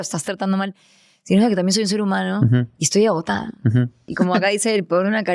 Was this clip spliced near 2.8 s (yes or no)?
no